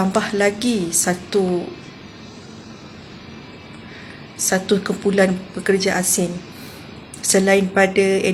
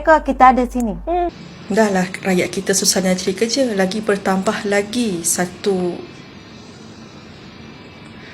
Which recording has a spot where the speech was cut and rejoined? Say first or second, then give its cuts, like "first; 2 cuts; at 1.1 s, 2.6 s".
second; 1 cut; at 1.5 s